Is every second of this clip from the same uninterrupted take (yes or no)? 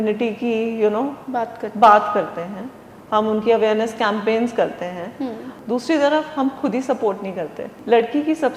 no